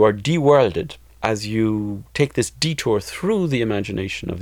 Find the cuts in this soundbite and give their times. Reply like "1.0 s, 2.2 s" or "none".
1.0 s